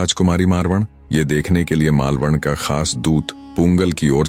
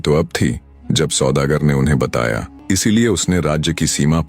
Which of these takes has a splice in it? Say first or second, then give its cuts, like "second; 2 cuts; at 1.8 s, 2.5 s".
second; 1 cut; at 2.5 s